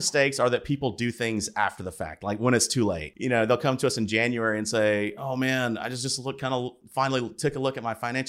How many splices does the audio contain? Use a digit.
1